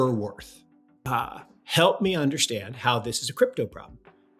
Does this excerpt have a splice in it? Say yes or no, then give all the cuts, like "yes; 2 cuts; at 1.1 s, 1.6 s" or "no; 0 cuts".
yes; 1 cut; at 1.1 s